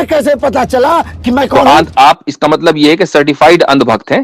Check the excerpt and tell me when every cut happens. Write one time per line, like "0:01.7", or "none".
0:01.5